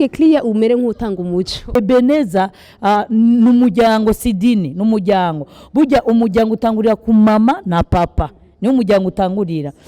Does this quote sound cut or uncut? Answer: cut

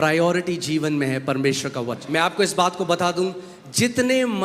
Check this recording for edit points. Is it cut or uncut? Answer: cut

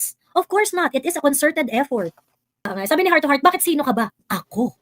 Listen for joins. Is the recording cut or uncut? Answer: cut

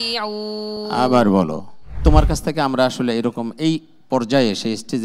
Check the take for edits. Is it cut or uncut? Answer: cut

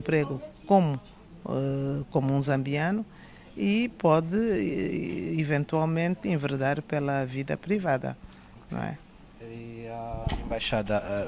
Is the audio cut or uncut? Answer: uncut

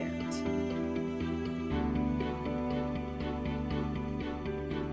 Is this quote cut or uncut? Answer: uncut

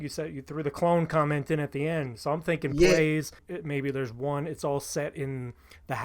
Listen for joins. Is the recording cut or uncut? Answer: cut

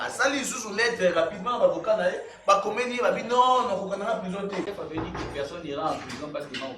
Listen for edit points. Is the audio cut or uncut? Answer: cut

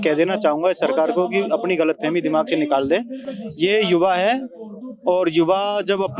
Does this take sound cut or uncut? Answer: uncut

